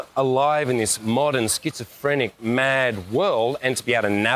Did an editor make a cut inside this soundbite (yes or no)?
no